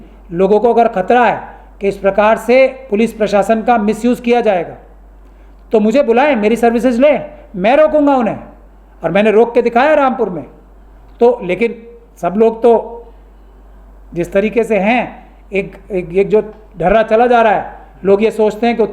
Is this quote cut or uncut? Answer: uncut